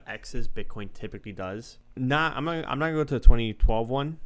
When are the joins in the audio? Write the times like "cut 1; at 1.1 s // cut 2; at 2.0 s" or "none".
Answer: cut 1; at 1.8 s